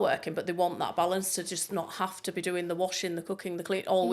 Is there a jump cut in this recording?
no; 0 cuts

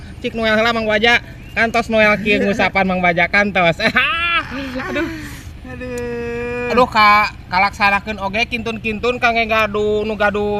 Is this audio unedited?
yes; 0 cuts

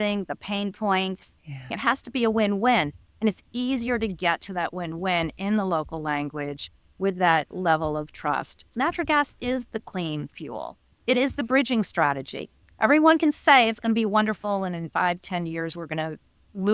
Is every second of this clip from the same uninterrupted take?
no; 2 cuts; at 1.7 s, 8.7 s

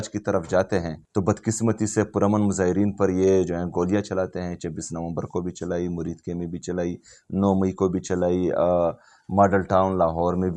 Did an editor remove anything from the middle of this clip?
yes; 1 cut; at 1.0 s

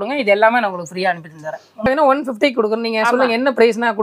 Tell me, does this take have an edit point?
yes; 1 cut; at 1.9 s

